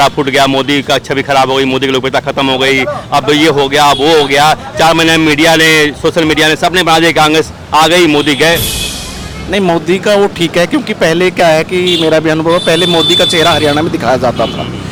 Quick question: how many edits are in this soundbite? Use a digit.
0